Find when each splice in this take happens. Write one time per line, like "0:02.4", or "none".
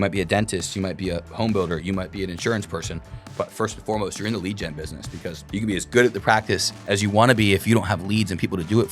0:05.4
0:06.7